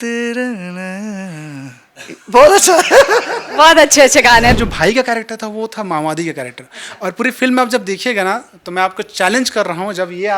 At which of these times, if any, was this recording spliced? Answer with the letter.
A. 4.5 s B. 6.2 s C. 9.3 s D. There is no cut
A